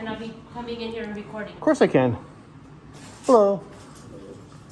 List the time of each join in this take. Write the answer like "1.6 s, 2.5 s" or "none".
none